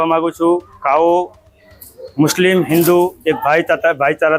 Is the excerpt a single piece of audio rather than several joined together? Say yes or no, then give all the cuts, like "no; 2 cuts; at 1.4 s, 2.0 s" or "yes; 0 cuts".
yes; 0 cuts